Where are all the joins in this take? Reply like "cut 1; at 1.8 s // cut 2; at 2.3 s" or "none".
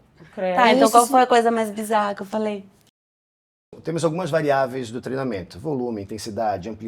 cut 1; at 3.3 s

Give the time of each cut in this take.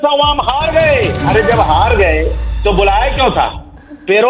none

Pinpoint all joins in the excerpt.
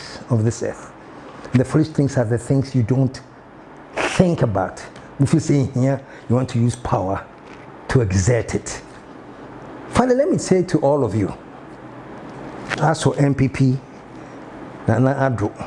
none

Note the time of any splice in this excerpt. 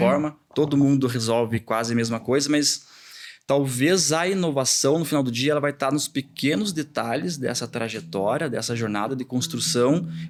none

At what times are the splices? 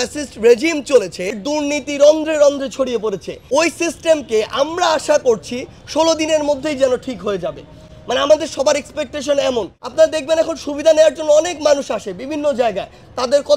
cut 1; at 1.4 s // cut 2; at 3.3 s // cut 3; at 9.8 s

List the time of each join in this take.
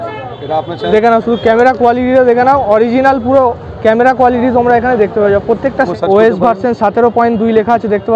cut 1; at 0.8 s // cut 2; at 5.9 s

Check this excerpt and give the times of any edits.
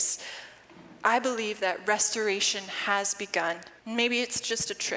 cut 1; at 3.7 s

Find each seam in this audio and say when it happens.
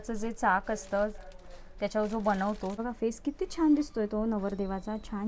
cut 1; at 2.8 s

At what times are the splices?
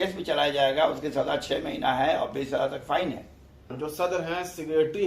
cut 1; at 3.8 s

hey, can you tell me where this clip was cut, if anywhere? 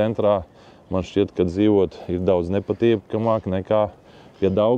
none

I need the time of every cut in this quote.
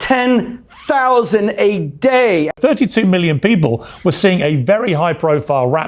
cut 1; at 2.5 s

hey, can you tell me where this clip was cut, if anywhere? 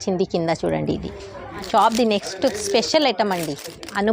cut 1; at 1.6 s

